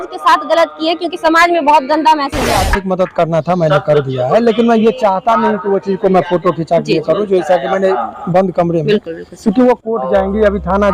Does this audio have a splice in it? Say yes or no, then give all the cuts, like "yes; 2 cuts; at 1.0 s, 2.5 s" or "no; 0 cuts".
yes; 1 cut; at 2.6 s